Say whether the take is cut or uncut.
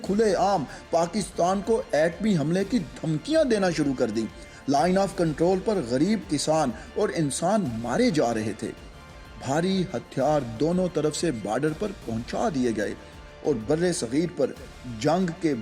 uncut